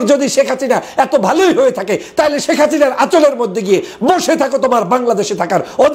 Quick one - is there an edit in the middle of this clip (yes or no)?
no